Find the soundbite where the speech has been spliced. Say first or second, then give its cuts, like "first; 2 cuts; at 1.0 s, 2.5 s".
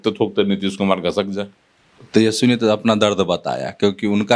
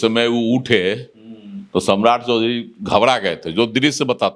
first; 1 cut; at 1.9 s